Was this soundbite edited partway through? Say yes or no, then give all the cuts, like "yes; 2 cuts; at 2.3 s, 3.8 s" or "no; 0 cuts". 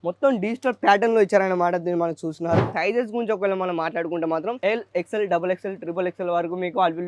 yes; 1 cut; at 2.7 s